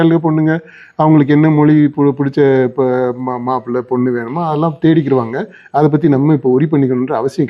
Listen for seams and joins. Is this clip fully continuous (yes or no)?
yes